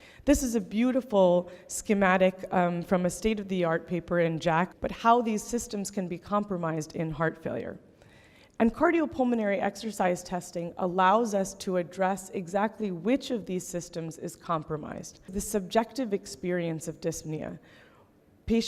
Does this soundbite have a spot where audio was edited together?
yes; 2 cuts; at 4.7 s, 15.4 s

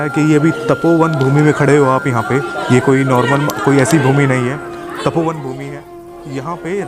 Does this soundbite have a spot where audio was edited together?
no; 0 cuts

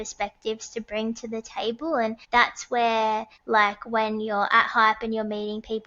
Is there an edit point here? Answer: yes; 2 cuts; at 2.2 s, 3.3 s

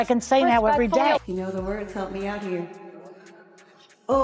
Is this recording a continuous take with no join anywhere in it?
yes; 0 cuts

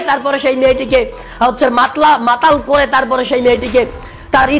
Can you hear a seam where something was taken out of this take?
no; 0 cuts

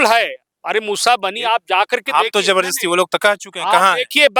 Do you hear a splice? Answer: no; 0 cuts

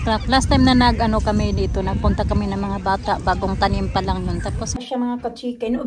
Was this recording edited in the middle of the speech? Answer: yes; 1 cut; at 4.8 s

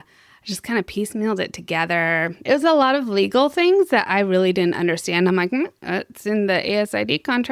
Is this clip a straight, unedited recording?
no; 1 cut; at 2.4 s

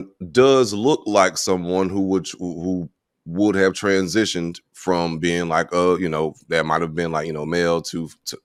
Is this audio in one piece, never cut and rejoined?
yes; 0 cuts

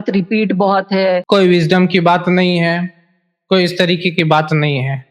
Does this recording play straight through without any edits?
no; 1 cut; at 1.2 s

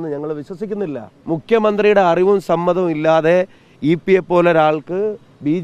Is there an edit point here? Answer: yes; 1 cut; at 1.1 s

